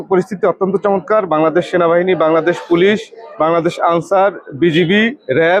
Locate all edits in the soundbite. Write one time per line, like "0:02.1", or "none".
none